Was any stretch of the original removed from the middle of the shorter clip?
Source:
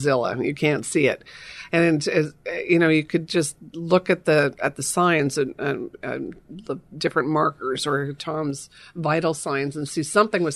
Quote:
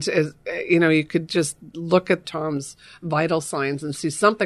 yes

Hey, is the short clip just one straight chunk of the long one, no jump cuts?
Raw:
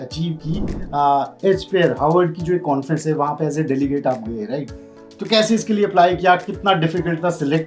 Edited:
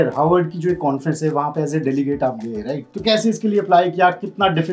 no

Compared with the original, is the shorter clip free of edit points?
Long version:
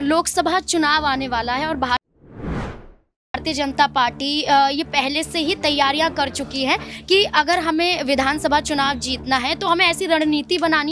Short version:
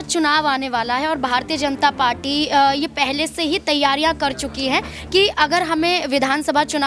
no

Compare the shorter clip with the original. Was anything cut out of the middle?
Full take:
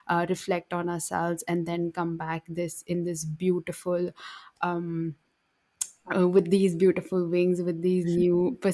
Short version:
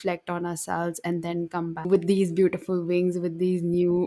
yes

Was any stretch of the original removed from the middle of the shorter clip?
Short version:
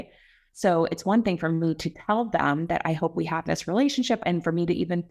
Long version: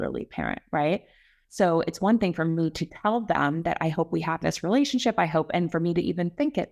yes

